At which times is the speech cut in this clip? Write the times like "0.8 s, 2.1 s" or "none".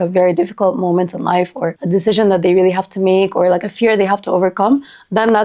1.8 s